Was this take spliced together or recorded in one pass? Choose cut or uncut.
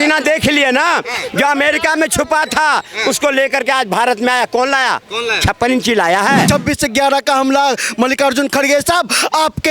cut